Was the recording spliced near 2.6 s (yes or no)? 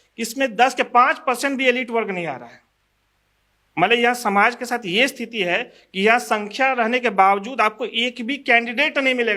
no